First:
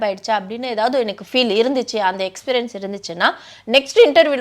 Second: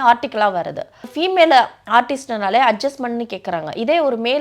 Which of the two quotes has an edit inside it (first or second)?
second